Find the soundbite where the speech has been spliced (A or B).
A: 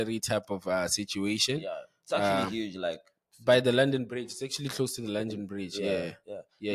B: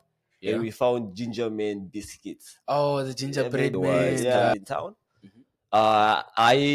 B